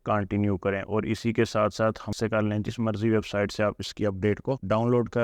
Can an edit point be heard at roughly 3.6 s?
no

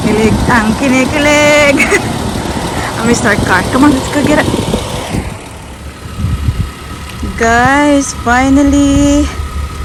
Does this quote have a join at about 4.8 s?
no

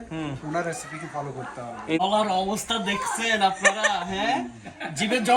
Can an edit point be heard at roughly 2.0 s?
yes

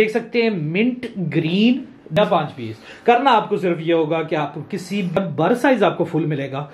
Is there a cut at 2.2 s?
yes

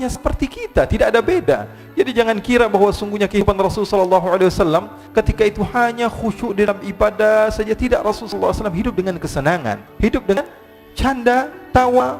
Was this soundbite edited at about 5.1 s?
no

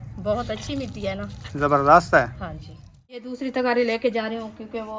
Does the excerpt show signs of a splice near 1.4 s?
no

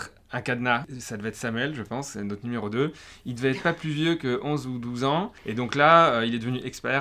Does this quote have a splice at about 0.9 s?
yes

